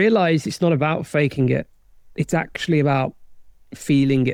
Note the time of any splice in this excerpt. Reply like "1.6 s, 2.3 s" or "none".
none